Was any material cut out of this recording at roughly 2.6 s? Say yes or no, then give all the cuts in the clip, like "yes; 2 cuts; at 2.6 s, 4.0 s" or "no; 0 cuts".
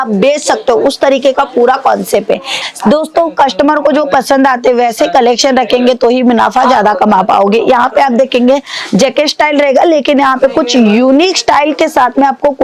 yes; 1 cut; at 2.6 s